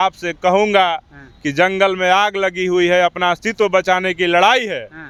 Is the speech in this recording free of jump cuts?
yes; 0 cuts

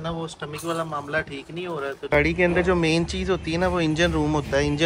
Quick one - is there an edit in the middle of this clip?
yes; 1 cut; at 2.1 s

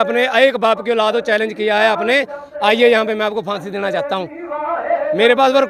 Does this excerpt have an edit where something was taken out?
no; 0 cuts

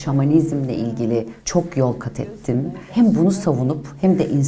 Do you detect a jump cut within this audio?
yes; 2 cuts; at 1.4 s, 2.8 s

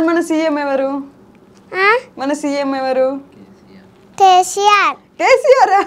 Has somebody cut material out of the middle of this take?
no; 0 cuts

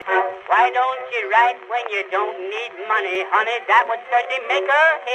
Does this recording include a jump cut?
yes; 1 cut; at 3.1 s

